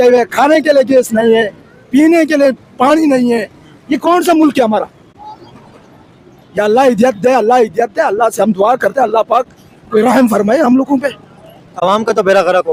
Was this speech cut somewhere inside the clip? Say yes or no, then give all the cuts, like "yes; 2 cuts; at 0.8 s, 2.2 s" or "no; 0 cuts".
no; 0 cuts